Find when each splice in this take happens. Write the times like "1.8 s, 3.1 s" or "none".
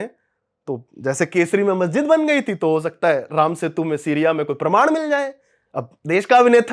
none